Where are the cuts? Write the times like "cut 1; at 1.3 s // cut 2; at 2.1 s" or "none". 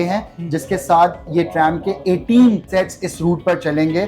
cut 1; at 2.6 s